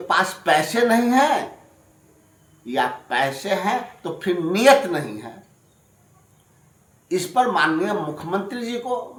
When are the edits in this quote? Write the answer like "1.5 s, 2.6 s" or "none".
none